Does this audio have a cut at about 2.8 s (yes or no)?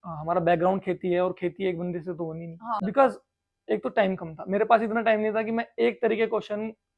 yes